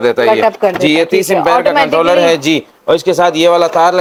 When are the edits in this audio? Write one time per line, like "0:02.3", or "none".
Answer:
none